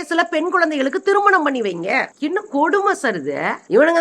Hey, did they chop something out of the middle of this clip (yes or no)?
no